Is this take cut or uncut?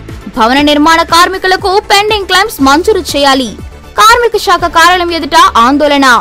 uncut